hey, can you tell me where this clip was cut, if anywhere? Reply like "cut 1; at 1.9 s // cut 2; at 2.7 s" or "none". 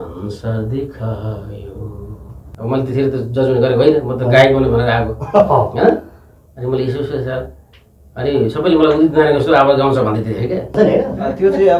cut 1; at 2.6 s // cut 2; at 10.7 s